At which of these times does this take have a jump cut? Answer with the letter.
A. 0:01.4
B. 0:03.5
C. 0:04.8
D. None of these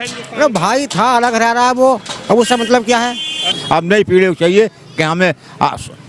B